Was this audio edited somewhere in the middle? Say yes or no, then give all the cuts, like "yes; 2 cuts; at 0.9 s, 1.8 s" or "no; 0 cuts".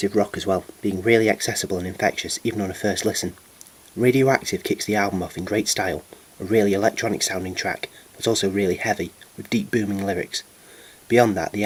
no; 0 cuts